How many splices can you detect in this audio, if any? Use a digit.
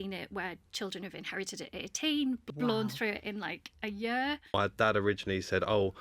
2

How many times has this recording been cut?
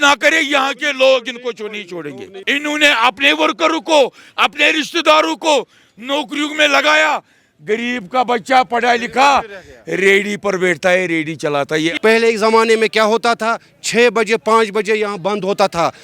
2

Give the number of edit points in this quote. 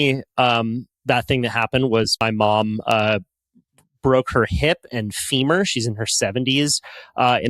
1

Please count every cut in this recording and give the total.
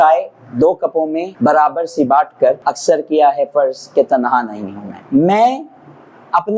3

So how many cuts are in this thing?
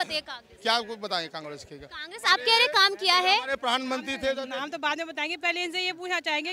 1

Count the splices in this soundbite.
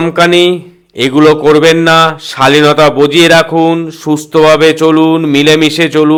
0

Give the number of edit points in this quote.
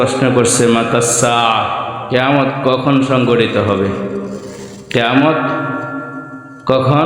1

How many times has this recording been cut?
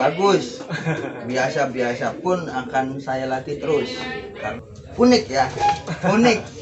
1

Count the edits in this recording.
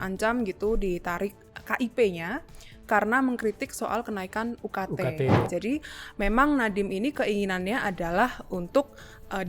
1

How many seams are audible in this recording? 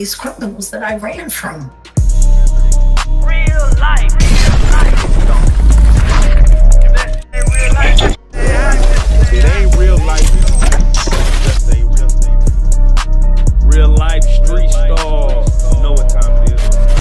2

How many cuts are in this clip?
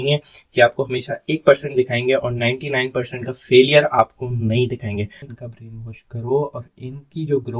1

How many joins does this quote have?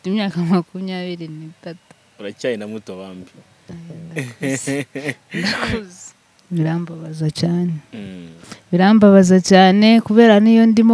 1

